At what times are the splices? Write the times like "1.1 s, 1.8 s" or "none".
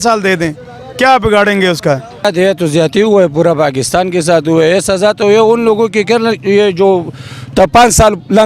2.2 s

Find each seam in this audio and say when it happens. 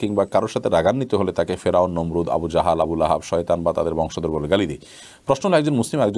none

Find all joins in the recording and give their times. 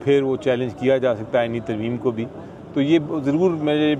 none

